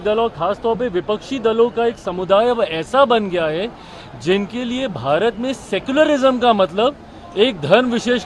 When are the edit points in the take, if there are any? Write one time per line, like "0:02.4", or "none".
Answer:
none

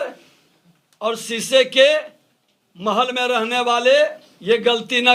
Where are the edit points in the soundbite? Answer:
none

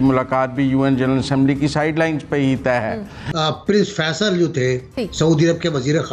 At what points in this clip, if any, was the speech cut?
0:03.2

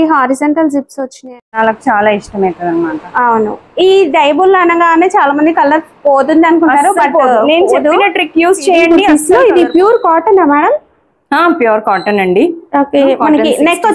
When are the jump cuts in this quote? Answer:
0:01.4
0:09.0

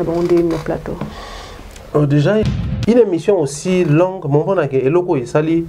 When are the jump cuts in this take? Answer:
0:02.5

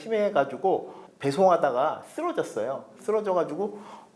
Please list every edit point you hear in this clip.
0:01.0

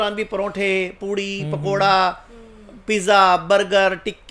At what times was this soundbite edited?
none

